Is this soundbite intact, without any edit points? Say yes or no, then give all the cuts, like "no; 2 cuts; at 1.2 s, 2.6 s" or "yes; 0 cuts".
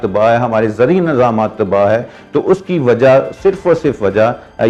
yes; 0 cuts